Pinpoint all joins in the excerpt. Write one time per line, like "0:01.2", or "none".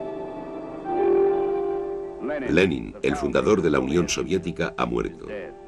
0:03.3